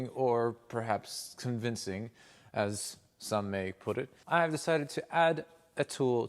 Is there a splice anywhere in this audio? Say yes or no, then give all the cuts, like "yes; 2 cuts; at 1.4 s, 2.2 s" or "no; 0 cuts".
yes; 1 cut; at 4.1 s